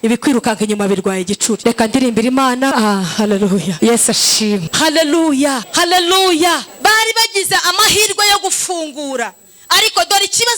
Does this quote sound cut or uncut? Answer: cut